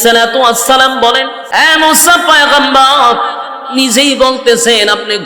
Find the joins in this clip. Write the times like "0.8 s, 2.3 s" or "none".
1.4 s